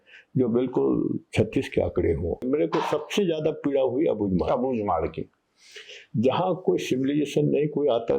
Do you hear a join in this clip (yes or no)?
yes